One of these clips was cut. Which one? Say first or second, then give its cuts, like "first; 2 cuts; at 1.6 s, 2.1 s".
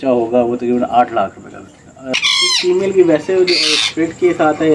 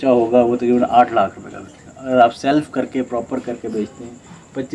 first; 1 cut; at 2.0 s